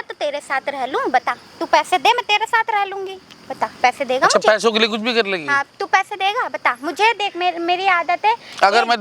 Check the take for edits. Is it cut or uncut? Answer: uncut